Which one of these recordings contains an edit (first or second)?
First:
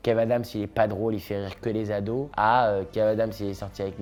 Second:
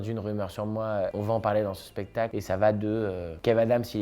second